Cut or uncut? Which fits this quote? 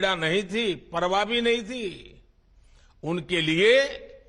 uncut